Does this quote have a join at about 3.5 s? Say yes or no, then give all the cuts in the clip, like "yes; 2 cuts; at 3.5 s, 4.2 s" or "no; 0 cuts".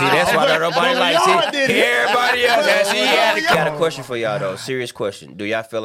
yes; 1 cut; at 3.5 s